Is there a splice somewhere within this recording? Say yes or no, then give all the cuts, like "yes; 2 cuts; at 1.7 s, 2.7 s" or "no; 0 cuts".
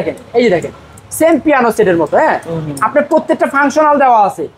no; 0 cuts